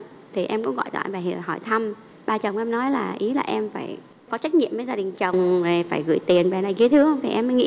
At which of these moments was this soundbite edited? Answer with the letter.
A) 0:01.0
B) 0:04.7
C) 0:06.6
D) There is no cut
D